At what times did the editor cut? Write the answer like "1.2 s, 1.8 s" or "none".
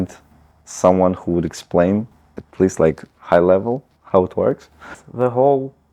5.0 s